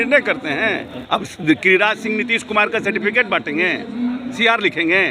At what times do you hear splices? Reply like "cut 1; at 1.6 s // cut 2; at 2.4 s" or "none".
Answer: cut 1; at 0.9 s

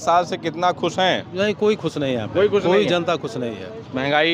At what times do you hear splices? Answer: none

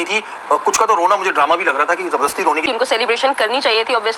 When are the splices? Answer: cut 1; at 2.6 s

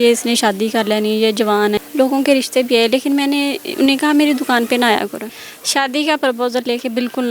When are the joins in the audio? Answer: cut 1; at 1.8 s // cut 2; at 5.3 s

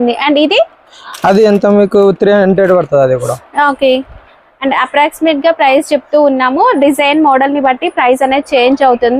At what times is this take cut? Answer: none

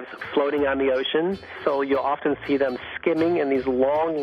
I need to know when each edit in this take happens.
cut 1; at 1.5 s

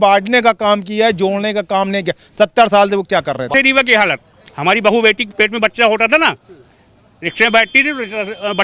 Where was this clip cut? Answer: cut 1; at 3.5 s

